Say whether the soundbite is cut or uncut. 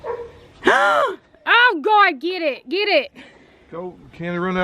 uncut